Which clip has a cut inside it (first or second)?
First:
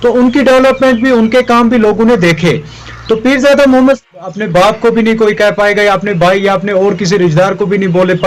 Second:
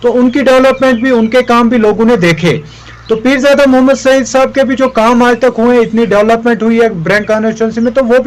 first